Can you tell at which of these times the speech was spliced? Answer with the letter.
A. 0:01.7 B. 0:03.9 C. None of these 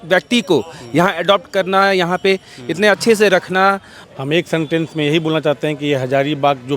B